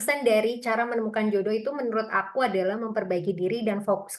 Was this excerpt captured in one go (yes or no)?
yes